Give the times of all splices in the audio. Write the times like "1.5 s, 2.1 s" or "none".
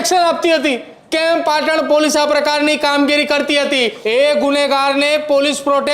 0.9 s, 4.0 s